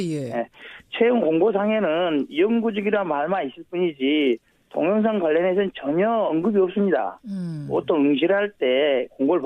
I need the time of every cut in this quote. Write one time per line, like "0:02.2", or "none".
0:01.2